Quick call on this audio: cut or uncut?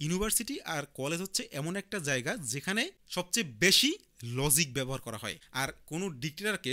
cut